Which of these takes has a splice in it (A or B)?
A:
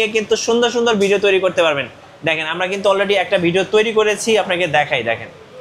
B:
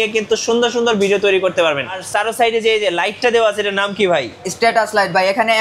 B